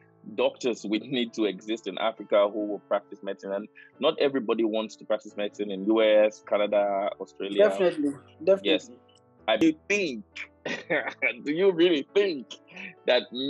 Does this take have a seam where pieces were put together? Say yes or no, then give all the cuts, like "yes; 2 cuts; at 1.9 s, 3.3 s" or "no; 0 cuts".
yes; 1 cut; at 9.6 s